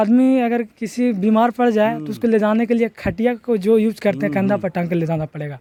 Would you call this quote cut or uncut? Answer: uncut